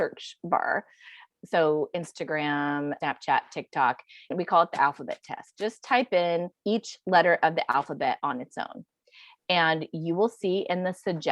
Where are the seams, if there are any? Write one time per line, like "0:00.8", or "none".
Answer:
0:01.2
0:03.0
0:04.3
0:06.5